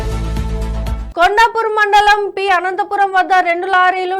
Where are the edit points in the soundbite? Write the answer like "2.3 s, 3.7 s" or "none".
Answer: 1.0 s